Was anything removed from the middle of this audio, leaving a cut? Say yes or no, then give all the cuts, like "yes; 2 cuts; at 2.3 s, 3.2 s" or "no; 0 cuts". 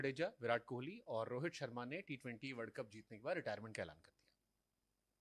no; 0 cuts